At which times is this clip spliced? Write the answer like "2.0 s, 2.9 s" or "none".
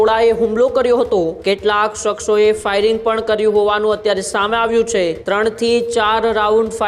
1.4 s, 5.2 s